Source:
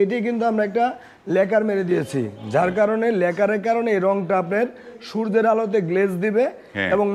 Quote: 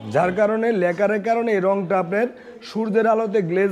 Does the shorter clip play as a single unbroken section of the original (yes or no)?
yes